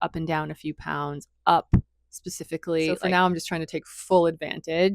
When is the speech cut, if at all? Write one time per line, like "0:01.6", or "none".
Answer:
0:03.0